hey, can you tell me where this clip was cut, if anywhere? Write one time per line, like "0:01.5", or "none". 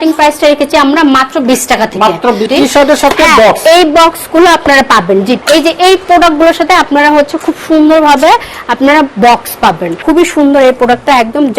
0:02.5
0:05.4
0:09.9